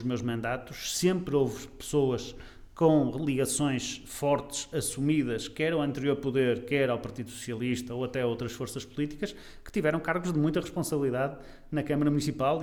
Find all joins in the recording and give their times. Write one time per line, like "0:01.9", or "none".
none